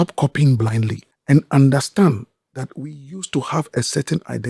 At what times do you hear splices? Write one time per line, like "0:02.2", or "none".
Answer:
0:01.1